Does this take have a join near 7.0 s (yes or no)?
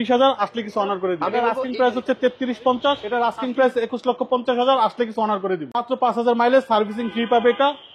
no